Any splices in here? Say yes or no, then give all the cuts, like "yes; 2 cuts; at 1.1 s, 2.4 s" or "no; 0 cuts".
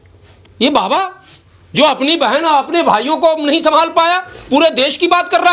no; 0 cuts